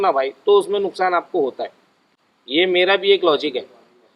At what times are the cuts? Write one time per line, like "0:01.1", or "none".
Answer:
none